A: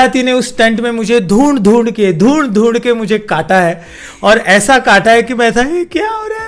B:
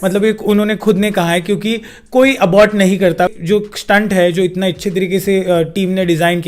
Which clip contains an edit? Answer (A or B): B